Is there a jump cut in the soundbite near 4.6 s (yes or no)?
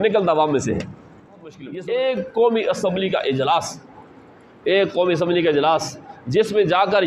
no